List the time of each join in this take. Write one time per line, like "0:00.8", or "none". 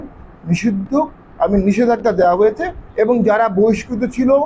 0:02.8